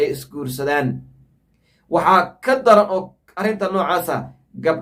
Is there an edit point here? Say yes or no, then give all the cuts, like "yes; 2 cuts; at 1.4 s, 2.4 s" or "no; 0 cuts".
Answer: no; 0 cuts